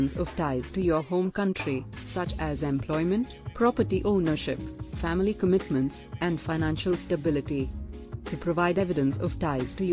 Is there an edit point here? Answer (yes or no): yes